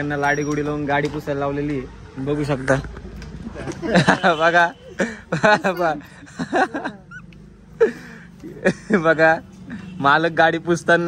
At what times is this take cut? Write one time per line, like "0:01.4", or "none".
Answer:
none